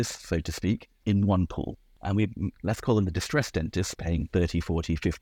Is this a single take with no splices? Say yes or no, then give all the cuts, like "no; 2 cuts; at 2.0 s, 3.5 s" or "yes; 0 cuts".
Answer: no; 2 cuts; at 0.9 s, 1.9 s